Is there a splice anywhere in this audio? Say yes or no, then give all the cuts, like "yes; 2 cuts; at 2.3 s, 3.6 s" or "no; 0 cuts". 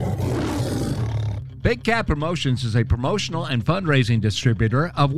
yes; 1 cut; at 1.0 s